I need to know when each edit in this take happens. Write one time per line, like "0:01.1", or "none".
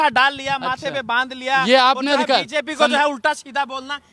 none